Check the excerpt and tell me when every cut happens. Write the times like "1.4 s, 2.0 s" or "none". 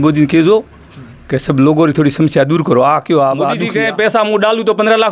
3.6 s